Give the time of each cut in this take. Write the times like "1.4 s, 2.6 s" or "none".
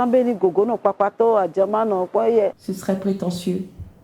2.7 s